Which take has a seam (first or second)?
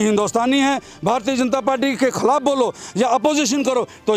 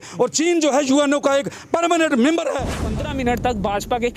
second